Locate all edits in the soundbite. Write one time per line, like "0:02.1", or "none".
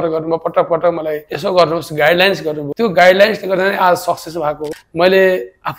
0:04.7